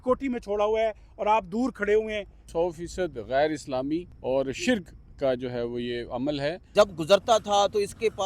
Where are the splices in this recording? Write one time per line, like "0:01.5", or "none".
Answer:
0:02.4
0:04.1
0:06.6